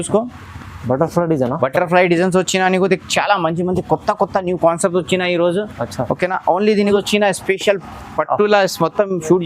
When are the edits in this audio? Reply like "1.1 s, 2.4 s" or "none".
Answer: 6.9 s